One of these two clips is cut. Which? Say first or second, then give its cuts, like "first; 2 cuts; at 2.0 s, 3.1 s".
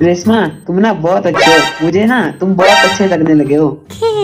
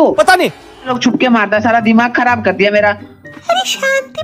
second; 1 cut; at 0.9 s